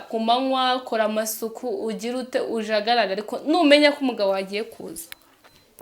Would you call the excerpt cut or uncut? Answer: uncut